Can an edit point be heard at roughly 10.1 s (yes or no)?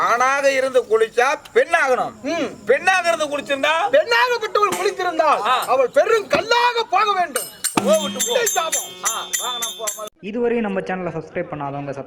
yes